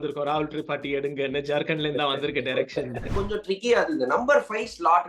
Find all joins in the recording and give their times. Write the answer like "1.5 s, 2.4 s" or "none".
3.1 s